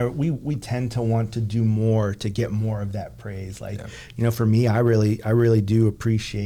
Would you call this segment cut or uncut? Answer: uncut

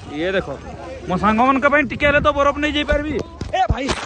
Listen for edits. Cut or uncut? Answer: uncut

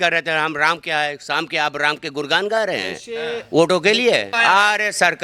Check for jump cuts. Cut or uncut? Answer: cut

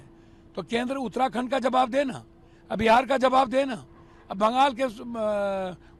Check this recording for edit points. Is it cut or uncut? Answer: uncut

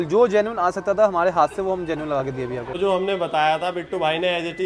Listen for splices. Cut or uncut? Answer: cut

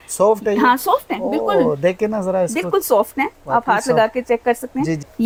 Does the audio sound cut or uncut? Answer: uncut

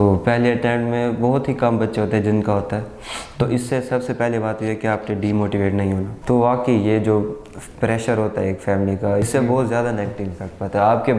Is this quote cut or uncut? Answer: cut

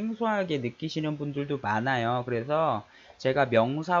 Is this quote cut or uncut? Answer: cut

